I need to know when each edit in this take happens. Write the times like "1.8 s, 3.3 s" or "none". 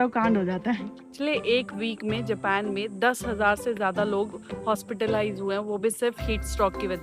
1.0 s

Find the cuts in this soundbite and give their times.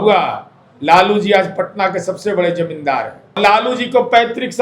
3.4 s

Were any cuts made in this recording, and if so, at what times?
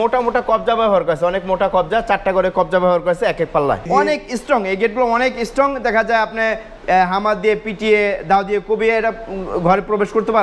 3.9 s

